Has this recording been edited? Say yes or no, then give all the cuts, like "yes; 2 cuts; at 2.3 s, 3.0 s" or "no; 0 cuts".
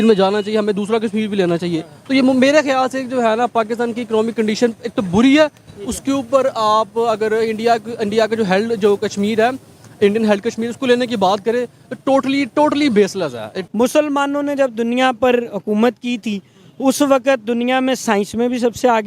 yes; 1 cut; at 13.6 s